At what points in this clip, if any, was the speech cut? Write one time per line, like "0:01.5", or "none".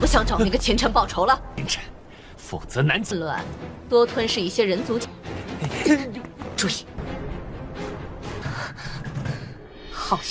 none